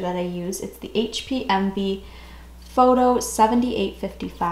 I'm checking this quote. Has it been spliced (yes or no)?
no